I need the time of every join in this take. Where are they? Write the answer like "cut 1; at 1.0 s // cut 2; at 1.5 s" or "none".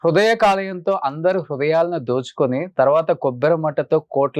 none

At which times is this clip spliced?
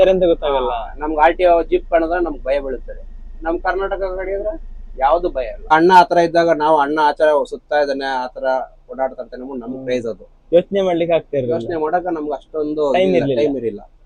cut 1; at 5.7 s

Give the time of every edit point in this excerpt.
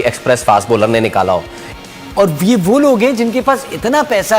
cut 1; at 1.6 s

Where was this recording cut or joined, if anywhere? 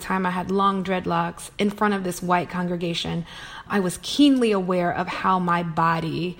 none

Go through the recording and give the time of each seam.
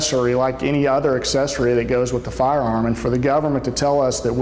none

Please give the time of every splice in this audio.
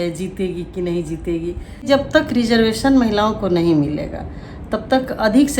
cut 1; at 1.9 s

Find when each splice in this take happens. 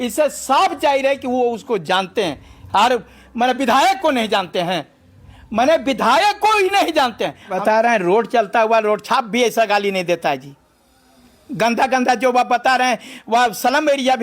cut 1; at 7.6 s

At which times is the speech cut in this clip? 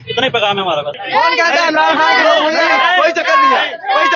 cut 1; at 1.0 s

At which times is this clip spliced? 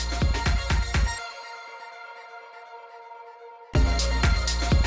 cut 1; at 3.2 s

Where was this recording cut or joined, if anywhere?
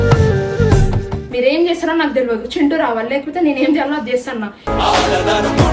cut 1; at 1.1 s

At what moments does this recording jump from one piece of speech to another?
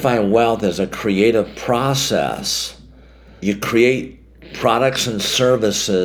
cut 1; at 3.4 s

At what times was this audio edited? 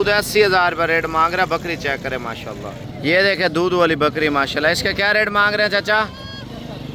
none

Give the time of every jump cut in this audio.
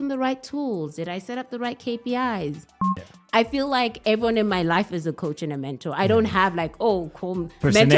cut 1; at 3.1 s

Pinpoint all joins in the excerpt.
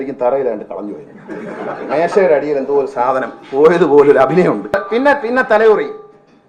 cut 1; at 4.7 s

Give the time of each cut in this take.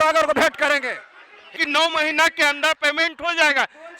cut 1; at 1.6 s

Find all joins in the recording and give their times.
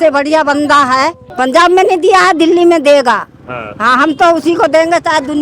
cut 1; at 1.2 s

